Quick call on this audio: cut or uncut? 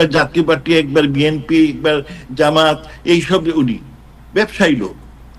uncut